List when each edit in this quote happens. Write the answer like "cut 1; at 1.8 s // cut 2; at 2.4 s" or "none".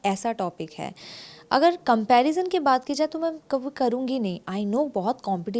none